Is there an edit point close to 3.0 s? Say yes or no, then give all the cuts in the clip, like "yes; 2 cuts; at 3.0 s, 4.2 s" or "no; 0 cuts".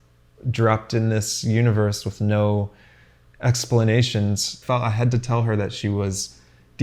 no; 1 cut; at 4.6 s